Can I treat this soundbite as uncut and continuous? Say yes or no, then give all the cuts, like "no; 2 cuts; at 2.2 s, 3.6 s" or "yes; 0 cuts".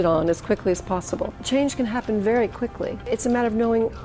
no; 2 cuts; at 1.4 s, 3.0 s